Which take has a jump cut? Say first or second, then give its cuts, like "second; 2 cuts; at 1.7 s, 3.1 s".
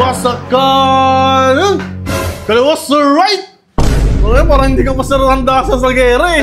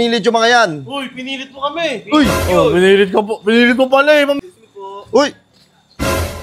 second; 1 cut; at 4.4 s